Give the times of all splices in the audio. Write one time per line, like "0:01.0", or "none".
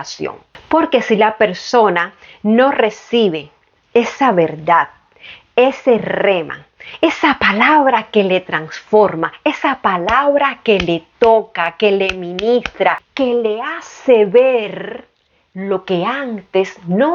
0:13.1